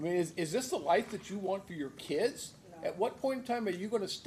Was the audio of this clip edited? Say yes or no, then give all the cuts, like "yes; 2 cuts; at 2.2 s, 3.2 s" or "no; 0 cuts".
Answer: no; 0 cuts